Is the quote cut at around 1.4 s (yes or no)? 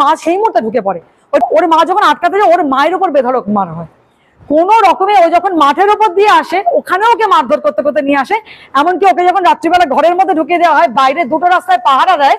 yes